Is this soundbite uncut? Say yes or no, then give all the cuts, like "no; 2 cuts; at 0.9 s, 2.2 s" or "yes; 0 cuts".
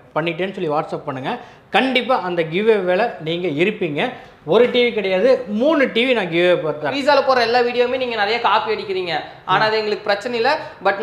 no; 1 cut; at 6.9 s